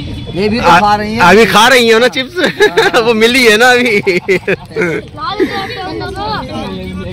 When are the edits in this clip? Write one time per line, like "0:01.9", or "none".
none